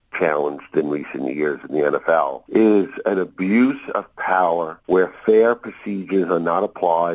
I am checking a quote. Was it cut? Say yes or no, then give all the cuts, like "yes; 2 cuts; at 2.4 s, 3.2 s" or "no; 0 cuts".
yes; 2 cuts; at 2.4 s, 4.7 s